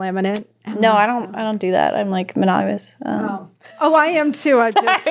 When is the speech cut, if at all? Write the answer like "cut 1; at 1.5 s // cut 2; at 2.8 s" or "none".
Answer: none